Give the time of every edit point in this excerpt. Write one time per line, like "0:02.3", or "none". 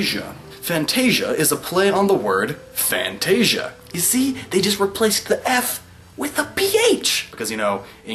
0:02.1

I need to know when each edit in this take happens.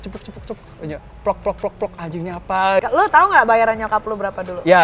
0:02.8

